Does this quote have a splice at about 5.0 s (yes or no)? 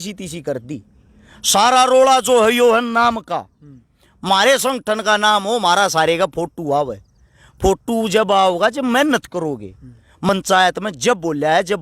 no